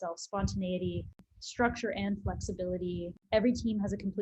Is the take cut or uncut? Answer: cut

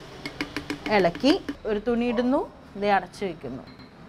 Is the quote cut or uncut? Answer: cut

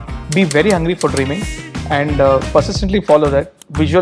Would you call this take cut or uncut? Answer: uncut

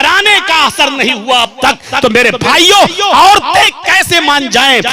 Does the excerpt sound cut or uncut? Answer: uncut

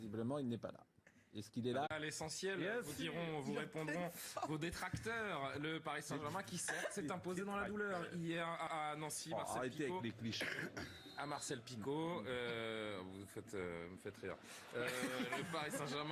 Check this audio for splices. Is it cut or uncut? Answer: uncut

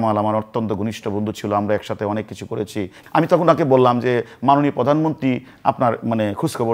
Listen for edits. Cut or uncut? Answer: cut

